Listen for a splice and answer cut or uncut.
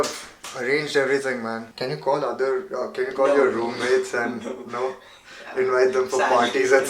cut